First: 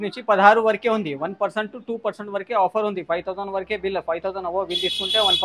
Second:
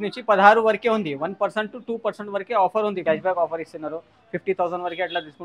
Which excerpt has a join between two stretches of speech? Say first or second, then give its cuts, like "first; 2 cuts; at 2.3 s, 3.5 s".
second; 1 cut; at 3.0 s